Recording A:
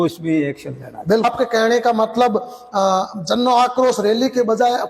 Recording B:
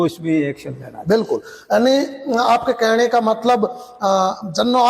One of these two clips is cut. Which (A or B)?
A